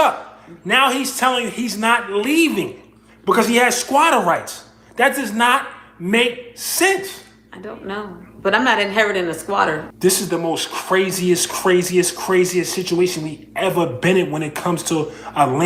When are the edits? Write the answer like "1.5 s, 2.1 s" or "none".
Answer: 9.8 s